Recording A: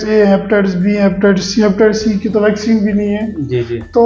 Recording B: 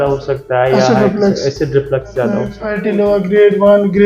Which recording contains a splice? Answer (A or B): B